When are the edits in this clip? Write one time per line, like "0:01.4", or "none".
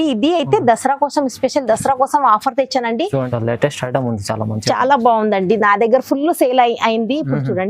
0:03.3